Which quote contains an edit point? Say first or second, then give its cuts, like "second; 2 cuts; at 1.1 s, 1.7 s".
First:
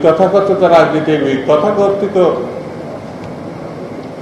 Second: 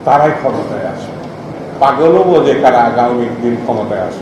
second; 1 cut; at 1.5 s